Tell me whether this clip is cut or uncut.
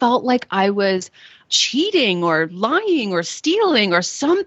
cut